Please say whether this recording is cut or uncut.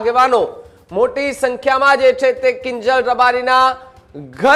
uncut